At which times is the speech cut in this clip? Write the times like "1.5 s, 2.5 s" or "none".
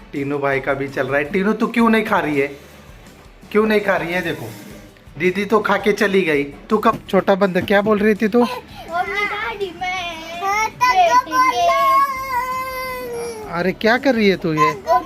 7.0 s